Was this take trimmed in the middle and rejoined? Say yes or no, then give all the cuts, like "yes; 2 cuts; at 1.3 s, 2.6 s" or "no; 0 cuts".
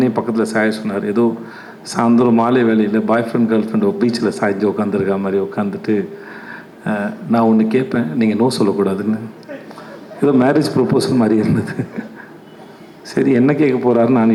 no; 0 cuts